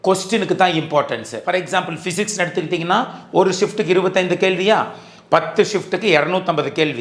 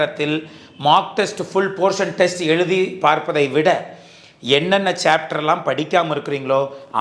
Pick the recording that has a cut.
first; 1 cut; at 1.3 s

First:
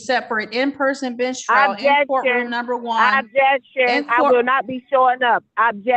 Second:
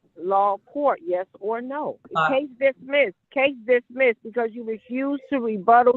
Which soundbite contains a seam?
second; 2 cuts; at 2.0 s, 3.2 s

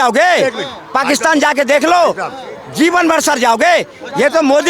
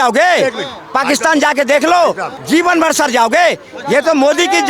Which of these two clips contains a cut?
second; 1 cut; at 2.3 s

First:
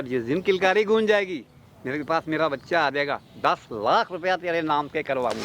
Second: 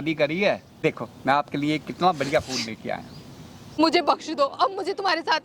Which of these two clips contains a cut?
second; 2 cuts; at 0.8 s, 3.8 s

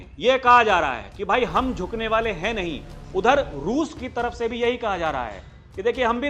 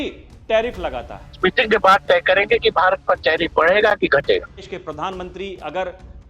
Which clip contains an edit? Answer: second; 2 cuts; at 1.3 s, 4.7 s

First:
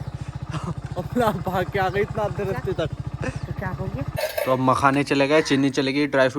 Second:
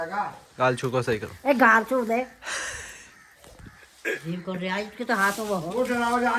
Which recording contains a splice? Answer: first; 1 cut; at 4.2 s

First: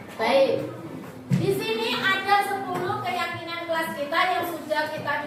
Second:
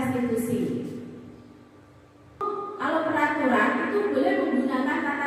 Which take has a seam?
second; 1 cut; at 2.4 s

